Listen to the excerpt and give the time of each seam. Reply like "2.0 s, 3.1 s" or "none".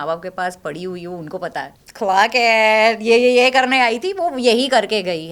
1.8 s